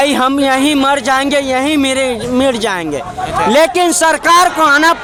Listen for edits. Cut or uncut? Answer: uncut